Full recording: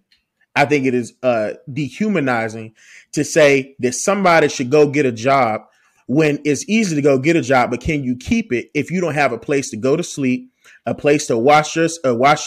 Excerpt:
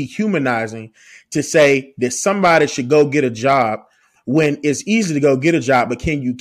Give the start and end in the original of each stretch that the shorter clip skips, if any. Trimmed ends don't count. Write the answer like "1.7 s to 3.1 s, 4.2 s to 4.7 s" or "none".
none